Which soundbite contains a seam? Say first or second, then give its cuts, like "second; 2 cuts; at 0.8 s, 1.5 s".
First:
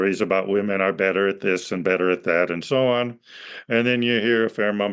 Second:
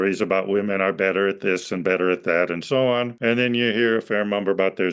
second; 1 cut; at 3.1 s